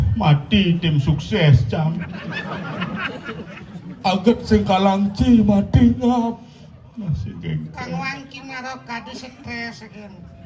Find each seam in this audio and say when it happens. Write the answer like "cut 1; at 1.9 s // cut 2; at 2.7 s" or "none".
none

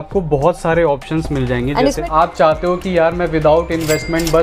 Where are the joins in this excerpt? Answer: cut 1; at 2.0 s

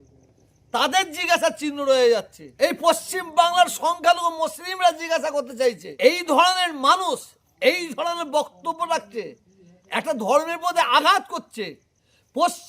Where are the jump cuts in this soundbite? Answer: cut 1; at 2.4 s // cut 2; at 5.9 s

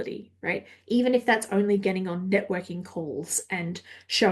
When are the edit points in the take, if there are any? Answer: none

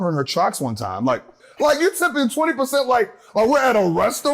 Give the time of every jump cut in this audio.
cut 1; at 1.3 s

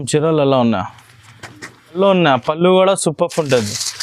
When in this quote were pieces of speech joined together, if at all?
cut 1; at 1.9 s

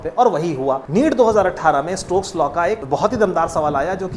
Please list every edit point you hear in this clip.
cut 1; at 0.8 s // cut 2; at 2.8 s

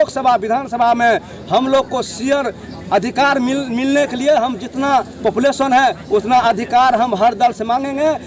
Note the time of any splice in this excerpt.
none

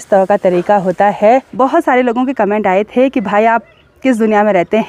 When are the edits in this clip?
cut 1; at 1.5 s

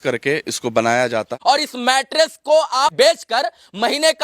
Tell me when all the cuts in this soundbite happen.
cut 1; at 1.3 s // cut 2; at 2.9 s

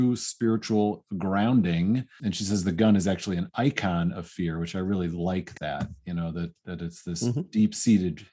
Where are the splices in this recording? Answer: cut 1; at 2.1 s

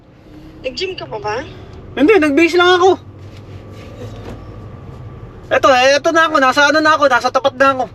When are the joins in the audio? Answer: none

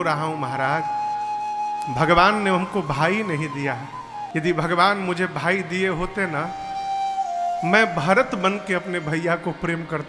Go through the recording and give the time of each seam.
cut 1; at 4.2 s

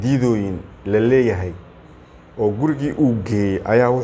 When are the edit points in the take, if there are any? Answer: none

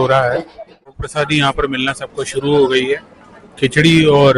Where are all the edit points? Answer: cut 1; at 0.9 s

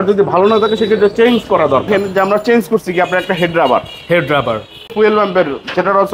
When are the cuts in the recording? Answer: cut 1; at 1.9 s // cut 2; at 4.9 s

